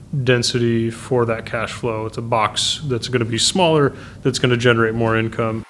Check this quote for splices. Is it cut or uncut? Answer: uncut